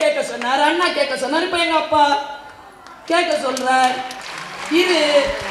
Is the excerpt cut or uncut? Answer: uncut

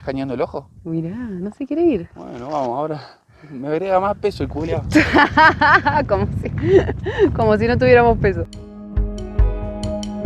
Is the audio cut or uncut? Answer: uncut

